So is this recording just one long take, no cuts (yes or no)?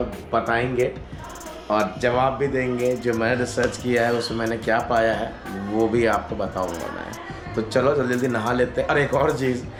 yes